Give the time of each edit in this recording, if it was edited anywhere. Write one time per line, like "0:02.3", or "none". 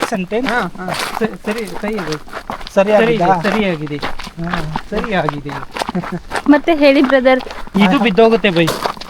0:07.7